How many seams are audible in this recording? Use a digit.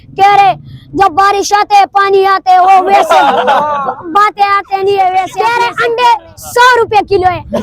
1